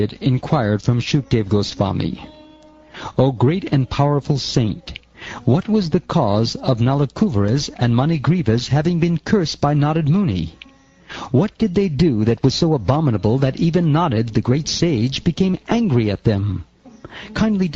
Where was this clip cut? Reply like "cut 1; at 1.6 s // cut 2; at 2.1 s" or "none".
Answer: cut 1; at 8.8 s